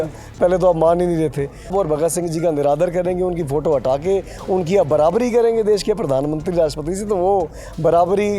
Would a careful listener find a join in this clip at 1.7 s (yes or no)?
yes